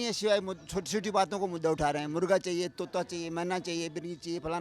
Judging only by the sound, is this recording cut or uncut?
uncut